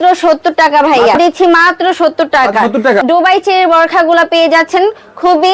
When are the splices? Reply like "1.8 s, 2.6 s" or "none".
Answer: 1.2 s, 3.0 s